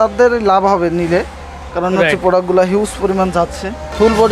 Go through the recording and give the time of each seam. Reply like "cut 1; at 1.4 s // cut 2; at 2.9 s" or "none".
none